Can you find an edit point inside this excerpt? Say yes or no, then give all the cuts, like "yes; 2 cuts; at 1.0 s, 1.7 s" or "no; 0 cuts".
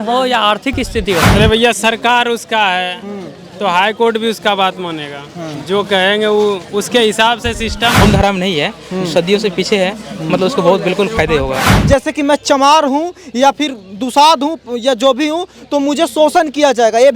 yes; 3 cuts; at 1.3 s, 8.0 s, 11.8 s